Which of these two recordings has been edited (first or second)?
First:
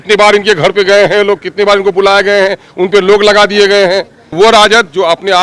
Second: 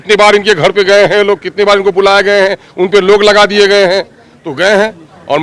first